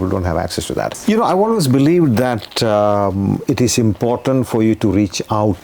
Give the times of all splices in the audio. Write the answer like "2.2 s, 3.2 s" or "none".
0.9 s